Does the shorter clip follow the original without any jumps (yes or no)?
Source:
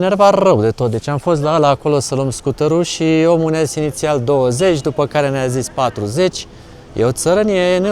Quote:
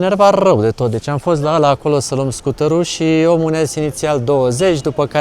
yes